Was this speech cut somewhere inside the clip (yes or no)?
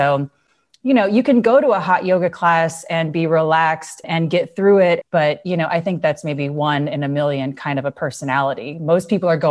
yes